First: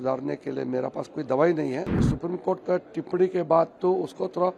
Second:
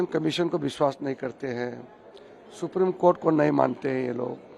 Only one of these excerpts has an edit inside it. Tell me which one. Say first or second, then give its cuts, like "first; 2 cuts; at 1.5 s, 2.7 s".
first; 1 cut; at 2.1 s